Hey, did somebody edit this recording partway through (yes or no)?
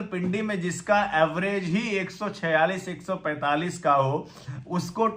no